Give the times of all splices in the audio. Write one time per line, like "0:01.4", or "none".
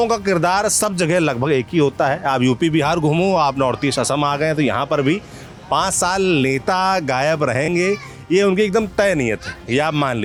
none